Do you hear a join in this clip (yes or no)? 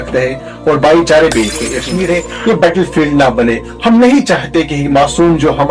yes